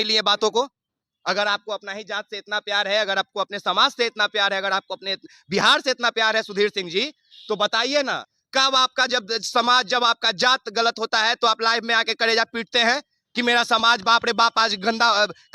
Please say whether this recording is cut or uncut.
cut